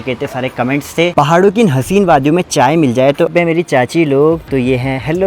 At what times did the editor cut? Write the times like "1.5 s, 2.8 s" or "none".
1.1 s, 3.3 s